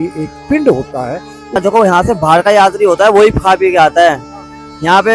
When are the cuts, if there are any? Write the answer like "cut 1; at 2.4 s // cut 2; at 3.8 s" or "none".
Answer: cut 1; at 1.6 s